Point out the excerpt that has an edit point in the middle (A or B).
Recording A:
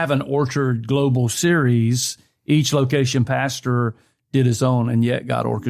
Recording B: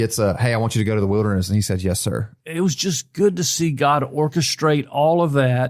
B